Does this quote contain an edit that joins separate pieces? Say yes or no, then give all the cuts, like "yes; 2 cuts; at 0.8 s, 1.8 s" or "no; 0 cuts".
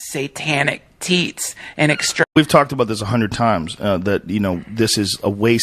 no; 0 cuts